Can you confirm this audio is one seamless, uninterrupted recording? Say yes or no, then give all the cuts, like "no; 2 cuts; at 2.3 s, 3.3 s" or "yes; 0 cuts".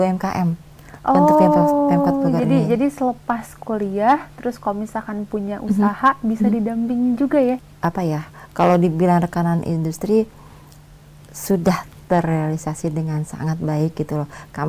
no; 1 cut; at 7.6 s